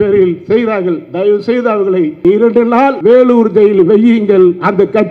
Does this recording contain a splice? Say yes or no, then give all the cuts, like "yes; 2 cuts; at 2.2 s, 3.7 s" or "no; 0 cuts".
yes; 2 cuts; at 2.2 s, 3.0 s